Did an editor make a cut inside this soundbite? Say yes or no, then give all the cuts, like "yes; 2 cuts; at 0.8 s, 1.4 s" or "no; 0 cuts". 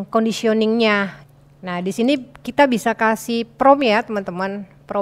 yes; 1 cut; at 1.2 s